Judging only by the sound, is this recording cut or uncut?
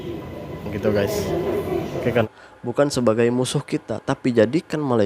cut